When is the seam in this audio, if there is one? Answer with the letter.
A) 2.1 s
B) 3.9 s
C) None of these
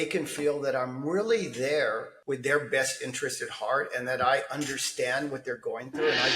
A